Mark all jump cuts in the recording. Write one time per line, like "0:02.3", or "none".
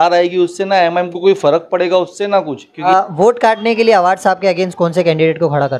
0:02.6